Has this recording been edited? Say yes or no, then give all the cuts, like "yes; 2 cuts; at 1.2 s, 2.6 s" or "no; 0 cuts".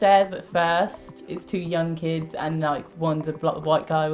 yes; 1 cut; at 1.3 s